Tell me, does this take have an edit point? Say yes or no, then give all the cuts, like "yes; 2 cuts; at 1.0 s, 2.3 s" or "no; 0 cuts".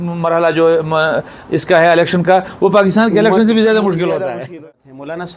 yes; 1 cut; at 4.5 s